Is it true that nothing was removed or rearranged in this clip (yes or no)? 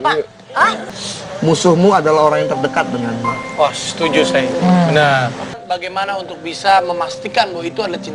no